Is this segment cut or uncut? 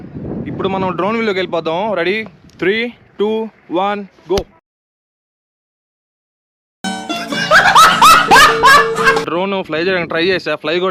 uncut